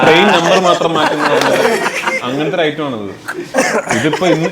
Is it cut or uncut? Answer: uncut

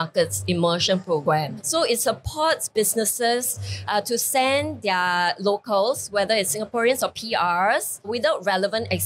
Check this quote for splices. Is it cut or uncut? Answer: uncut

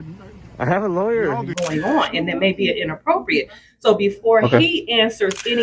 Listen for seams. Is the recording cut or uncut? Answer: cut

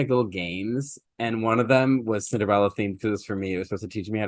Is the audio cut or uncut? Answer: uncut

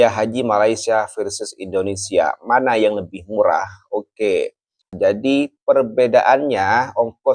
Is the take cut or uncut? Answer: cut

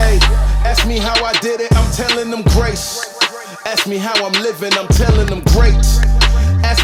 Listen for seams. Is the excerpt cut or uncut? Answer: uncut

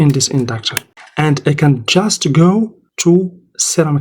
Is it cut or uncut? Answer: cut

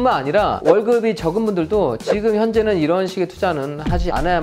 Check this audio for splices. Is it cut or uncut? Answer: uncut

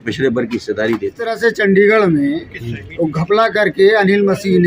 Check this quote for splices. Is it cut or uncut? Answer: cut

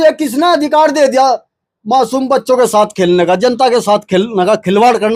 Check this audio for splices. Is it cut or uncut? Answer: uncut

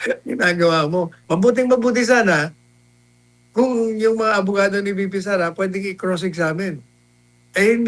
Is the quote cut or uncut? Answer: cut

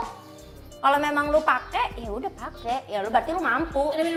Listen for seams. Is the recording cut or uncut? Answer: uncut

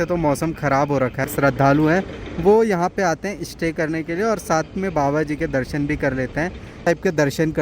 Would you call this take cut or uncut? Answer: cut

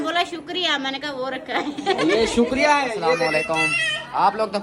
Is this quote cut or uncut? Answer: cut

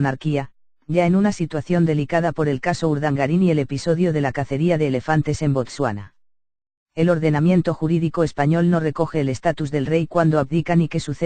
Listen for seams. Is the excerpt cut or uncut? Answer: cut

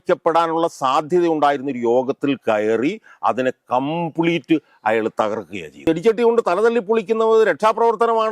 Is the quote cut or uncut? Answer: cut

